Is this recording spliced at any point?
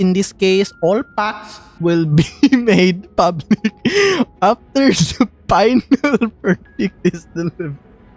no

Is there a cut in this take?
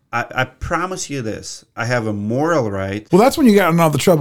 yes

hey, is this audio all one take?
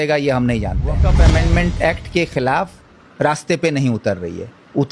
no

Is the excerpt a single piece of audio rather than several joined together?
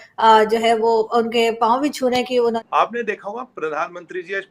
no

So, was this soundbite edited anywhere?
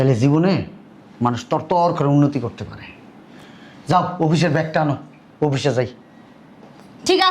no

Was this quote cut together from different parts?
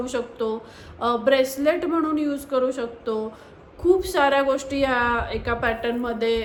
no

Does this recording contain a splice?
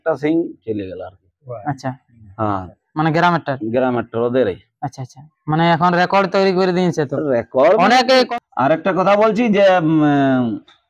yes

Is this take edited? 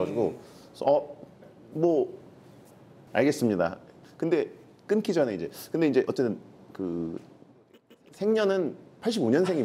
yes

